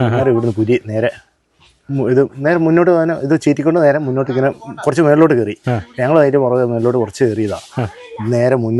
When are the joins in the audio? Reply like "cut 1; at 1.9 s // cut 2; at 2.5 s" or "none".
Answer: none